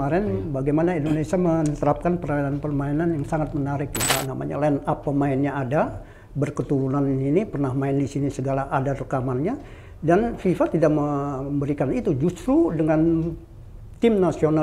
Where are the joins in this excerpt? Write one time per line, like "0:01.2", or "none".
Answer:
0:04.1